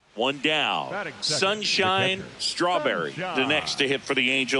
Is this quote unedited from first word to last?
no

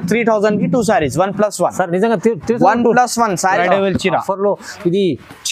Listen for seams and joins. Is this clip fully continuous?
no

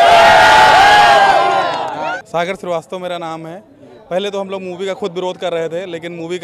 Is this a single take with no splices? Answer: no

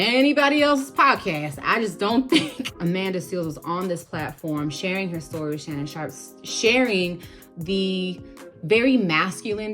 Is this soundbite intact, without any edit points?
no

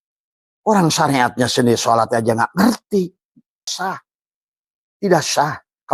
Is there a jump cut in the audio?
yes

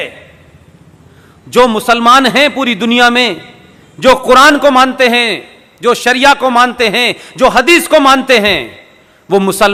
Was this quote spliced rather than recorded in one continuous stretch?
no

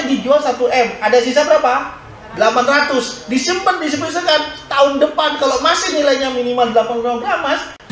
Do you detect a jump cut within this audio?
no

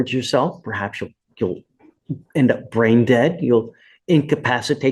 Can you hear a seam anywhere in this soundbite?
no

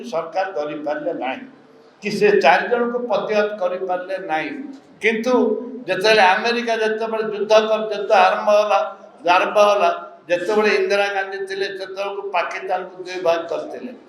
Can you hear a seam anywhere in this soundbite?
no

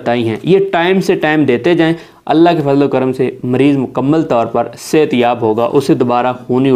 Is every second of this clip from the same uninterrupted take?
yes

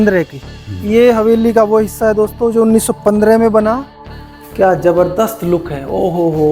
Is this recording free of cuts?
no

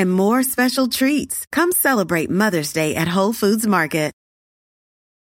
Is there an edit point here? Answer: no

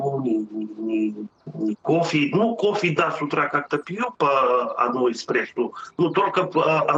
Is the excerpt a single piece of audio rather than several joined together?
yes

